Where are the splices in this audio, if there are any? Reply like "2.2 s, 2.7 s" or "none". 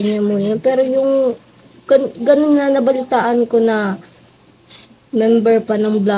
none